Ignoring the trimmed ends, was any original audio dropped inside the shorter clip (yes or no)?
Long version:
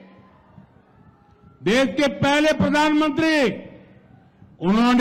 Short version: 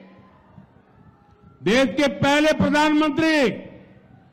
no